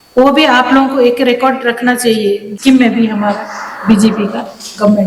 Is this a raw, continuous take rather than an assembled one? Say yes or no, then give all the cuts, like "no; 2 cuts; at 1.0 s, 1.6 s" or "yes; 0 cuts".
no; 1 cut; at 2.5 s